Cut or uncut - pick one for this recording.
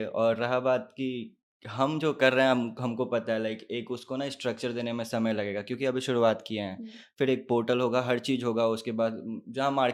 uncut